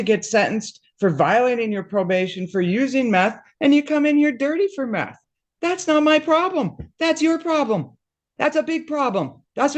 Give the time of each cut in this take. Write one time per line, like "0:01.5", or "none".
none

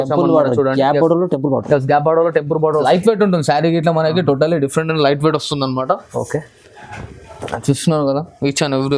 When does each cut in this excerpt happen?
0:02.8

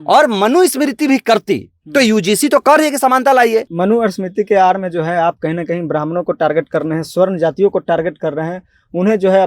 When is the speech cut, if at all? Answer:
0:03.7

